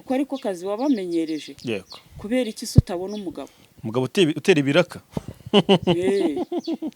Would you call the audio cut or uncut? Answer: uncut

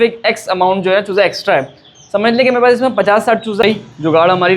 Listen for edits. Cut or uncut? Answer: cut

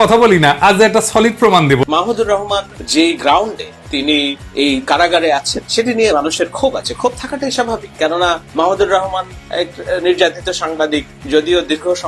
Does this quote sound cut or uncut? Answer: cut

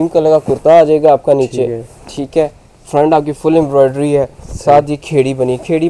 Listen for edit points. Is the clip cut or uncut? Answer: uncut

